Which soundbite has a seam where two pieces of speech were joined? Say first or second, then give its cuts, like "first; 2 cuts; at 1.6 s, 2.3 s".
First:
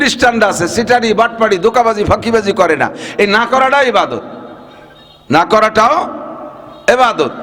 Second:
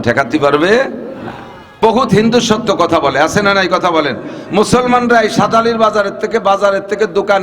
second; 1 cut; at 1.6 s